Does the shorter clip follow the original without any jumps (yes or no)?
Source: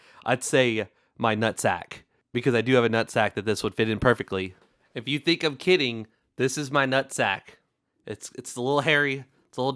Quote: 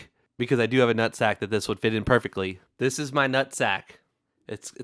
no